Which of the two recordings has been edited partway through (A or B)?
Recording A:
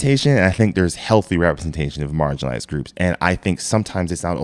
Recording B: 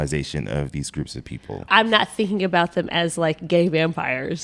B